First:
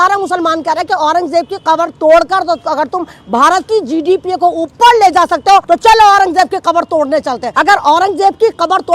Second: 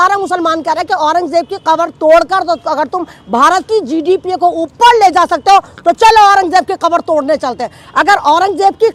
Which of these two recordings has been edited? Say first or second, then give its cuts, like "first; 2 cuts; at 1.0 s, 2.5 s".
first; 2 cuts; at 5.6 s, 7.5 s